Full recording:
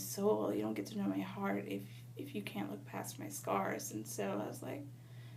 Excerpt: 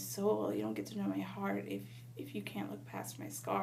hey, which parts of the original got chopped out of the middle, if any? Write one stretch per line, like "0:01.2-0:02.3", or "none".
none